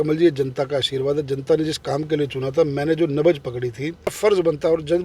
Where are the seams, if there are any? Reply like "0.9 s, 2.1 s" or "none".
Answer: 4.1 s